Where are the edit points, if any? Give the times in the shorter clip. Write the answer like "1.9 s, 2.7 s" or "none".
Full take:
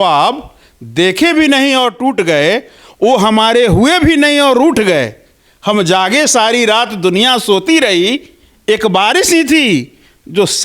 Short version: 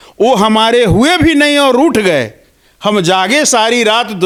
none